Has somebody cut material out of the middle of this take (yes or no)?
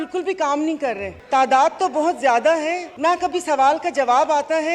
yes